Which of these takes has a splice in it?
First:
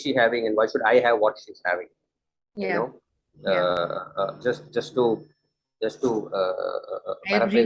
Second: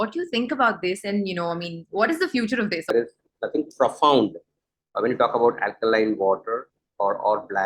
second; 1 cut; at 2.9 s

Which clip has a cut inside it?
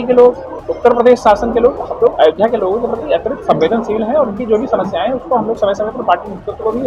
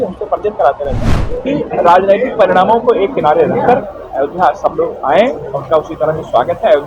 second; 1 cut; at 1.1 s

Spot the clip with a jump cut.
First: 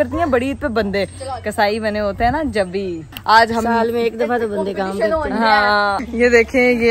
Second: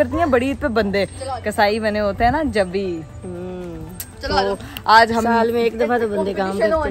first; 2 cuts; at 3.1 s, 6.0 s

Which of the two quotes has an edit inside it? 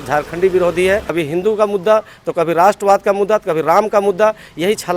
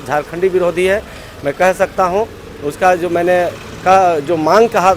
first; 1 cut; at 1.1 s

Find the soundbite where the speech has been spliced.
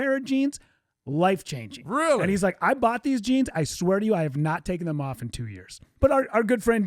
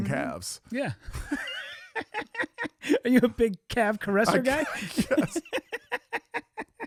first; 1 cut; at 5.8 s

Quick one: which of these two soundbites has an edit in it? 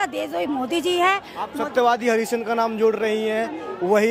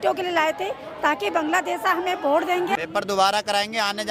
second; 1 cut; at 2.8 s

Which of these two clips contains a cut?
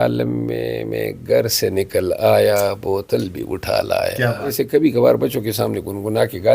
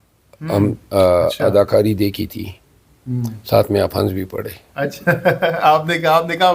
first; 1 cut; at 4.6 s

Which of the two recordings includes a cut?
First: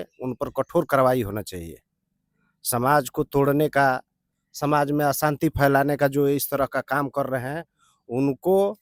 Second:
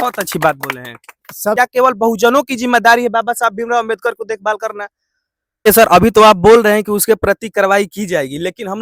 second; 2 cuts; at 1.6 s, 5.7 s

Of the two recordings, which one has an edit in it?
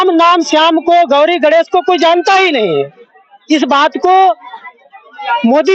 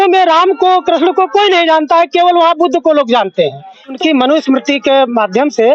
second; 1 cut; at 4.0 s

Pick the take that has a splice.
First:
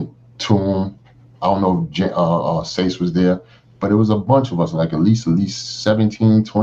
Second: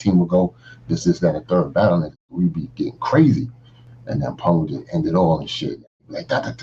second; 1 cut; at 3.8 s

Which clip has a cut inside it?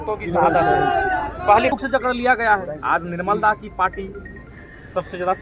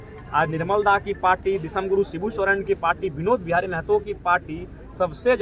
first; 1 cut; at 1.7 s

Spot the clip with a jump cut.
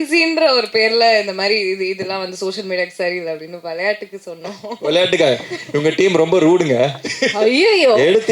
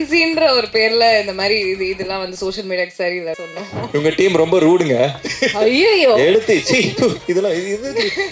second; 1 cut; at 3.7 s

